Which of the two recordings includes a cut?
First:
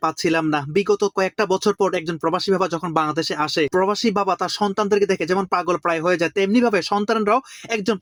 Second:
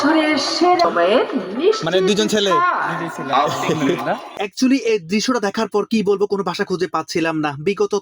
second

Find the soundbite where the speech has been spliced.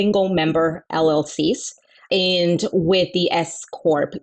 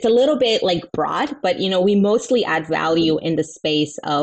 first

